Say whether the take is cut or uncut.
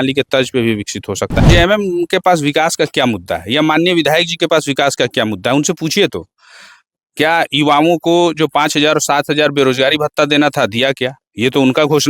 cut